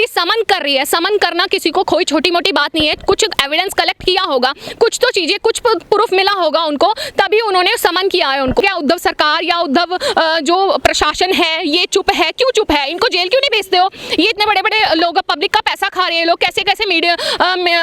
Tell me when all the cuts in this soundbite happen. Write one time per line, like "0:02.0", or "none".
0:08.6